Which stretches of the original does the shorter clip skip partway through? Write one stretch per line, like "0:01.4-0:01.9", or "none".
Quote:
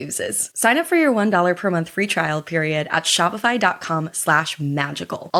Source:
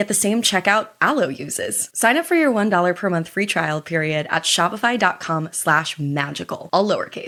none